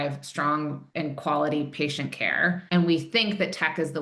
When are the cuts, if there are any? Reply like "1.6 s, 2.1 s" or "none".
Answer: none